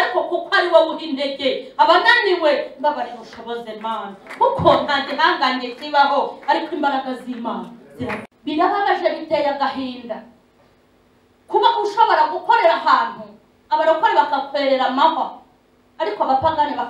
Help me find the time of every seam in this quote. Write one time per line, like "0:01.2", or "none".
0:08.2